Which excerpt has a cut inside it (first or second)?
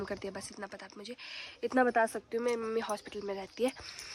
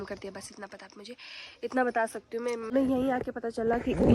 second